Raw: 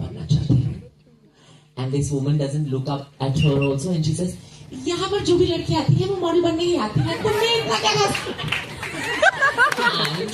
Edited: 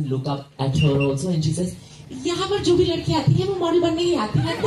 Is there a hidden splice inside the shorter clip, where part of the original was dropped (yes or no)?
no